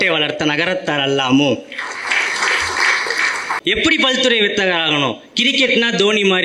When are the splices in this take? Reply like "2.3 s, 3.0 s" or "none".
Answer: 3.5 s